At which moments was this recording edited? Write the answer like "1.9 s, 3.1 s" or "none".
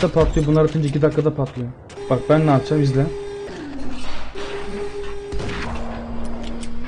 1.9 s, 3.5 s